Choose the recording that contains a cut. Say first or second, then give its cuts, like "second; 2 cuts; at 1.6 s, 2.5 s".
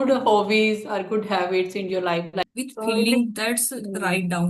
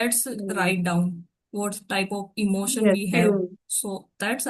first; 1 cut; at 2.4 s